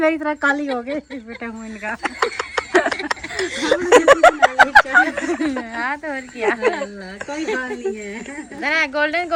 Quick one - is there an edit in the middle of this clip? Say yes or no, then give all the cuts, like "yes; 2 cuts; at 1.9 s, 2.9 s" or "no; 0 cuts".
no; 0 cuts